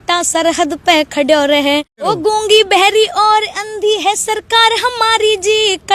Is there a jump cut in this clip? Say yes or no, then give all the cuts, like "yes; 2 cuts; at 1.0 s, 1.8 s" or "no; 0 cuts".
yes; 1 cut; at 2.0 s